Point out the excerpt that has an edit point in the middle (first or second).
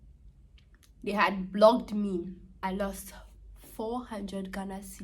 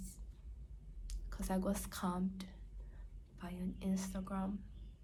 first